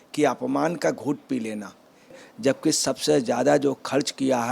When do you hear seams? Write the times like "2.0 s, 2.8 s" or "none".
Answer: 2.2 s